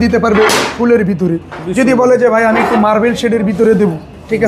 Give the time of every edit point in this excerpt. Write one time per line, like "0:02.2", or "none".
none